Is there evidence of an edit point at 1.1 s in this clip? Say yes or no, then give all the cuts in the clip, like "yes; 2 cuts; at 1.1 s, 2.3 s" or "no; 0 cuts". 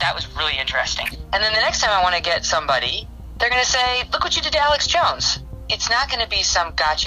yes; 2 cuts; at 1.1 s, 5.6 s